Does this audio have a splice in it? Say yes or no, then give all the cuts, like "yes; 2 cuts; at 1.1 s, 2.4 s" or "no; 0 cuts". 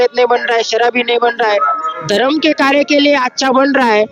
no; 0 cuts